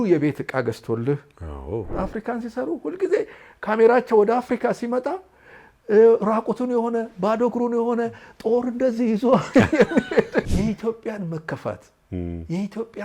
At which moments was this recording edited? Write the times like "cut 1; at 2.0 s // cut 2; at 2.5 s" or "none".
cut 1; at 1.9 s // cut 2; at 10.5 s